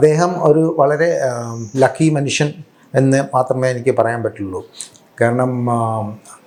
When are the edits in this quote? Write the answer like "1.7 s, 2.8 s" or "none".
none